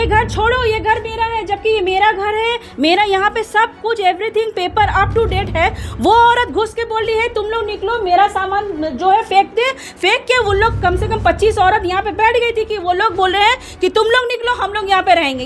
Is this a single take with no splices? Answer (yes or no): yes